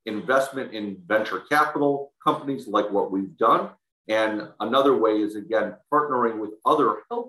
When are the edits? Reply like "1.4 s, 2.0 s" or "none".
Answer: none